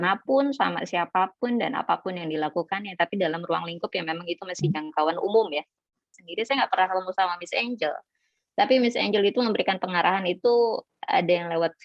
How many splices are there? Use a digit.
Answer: 1